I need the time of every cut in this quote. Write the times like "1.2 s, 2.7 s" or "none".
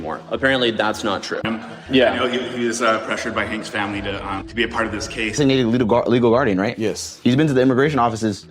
1.5 s, 5.4 s